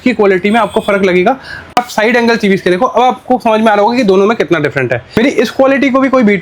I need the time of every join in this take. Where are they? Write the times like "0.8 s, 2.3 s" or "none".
1.7 s, 5.1 s